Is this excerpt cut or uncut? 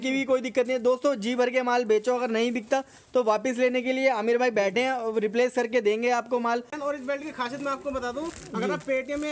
cut